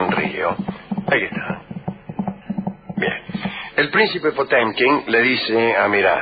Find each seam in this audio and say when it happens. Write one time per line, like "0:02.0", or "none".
0:03.2